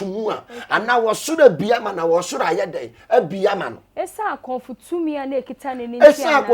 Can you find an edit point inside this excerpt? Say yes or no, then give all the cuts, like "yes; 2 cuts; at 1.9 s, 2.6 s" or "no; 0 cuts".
no; 0 cuts